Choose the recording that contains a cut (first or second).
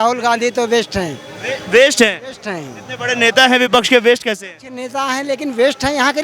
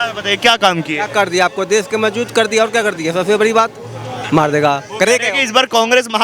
second